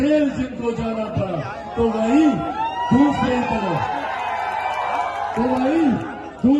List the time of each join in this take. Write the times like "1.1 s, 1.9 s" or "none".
none